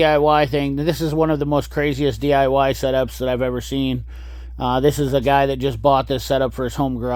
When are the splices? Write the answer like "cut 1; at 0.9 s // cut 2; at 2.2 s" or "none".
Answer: none